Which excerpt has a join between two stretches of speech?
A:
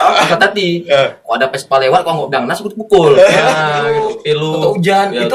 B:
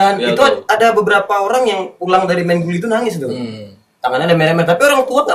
A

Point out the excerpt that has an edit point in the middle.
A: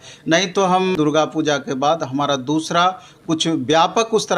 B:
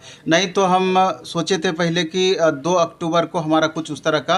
A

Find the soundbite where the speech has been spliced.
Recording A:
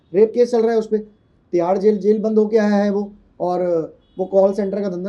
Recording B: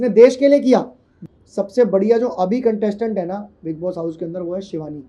B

